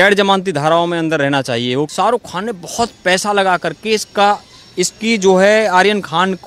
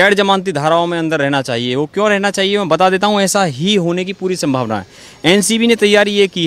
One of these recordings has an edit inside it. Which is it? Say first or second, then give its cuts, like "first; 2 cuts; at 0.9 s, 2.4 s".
first; 1 cut; at 1.9 s